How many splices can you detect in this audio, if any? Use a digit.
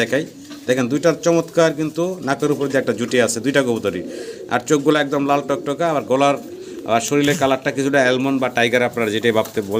0